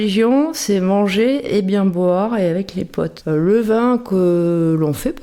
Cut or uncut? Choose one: cut